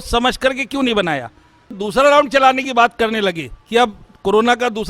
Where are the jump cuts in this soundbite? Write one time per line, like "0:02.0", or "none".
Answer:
0:01.8